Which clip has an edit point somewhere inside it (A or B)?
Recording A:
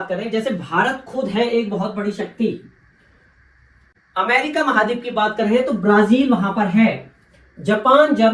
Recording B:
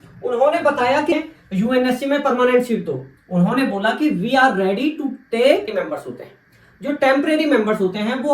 B